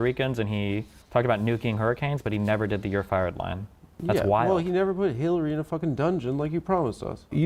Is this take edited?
yes; 1 cut; at 3.9 s

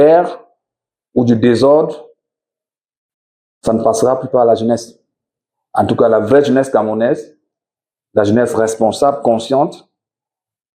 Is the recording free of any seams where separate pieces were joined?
yes; 0 cuts

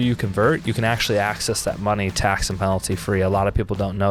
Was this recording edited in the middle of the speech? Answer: no; 0 cuts

